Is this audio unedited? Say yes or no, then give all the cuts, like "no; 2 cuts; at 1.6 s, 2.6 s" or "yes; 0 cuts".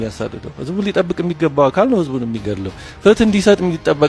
yes; 0 cuts